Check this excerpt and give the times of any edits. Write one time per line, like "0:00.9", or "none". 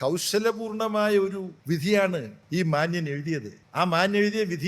0:01.5
0:02.4
0:03.6